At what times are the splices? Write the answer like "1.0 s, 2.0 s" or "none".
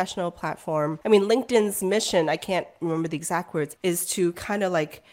1.0 s, 3.7 s